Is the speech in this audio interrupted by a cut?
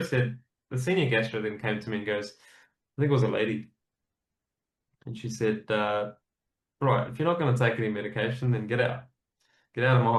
no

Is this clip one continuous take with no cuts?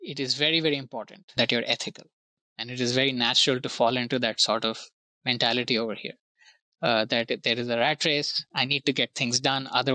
no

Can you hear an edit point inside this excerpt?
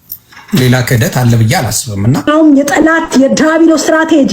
yes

